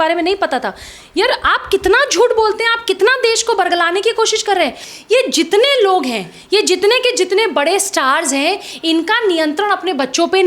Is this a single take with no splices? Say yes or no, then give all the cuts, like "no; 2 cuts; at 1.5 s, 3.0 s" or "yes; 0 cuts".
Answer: no; 1 cut; at 4.9 s